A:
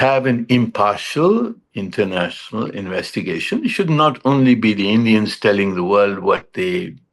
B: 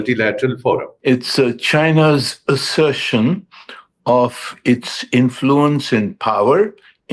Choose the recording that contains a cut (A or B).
B